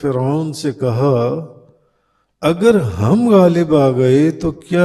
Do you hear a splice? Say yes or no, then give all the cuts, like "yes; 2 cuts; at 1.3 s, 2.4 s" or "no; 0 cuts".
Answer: no; 0 cuts